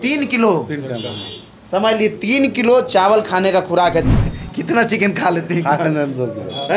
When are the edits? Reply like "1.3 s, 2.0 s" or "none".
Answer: 4.1 s